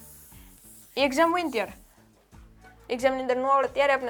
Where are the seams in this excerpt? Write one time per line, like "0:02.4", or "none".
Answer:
none